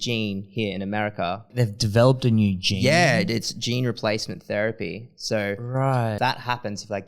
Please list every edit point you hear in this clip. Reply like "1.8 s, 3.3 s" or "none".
1.5 s, 6.2 s